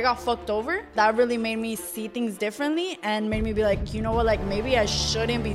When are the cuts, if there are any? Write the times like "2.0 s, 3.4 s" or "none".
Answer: 0.9 s